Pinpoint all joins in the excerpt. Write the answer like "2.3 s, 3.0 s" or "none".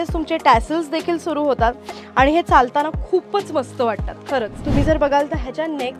4.6 s